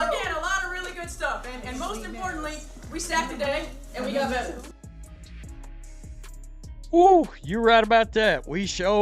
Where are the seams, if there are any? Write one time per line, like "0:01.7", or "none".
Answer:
0:07.9